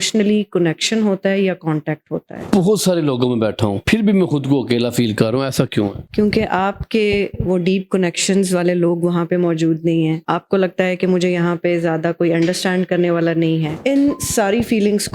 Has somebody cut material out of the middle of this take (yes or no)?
yes